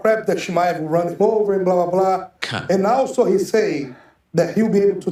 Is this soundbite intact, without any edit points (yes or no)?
yes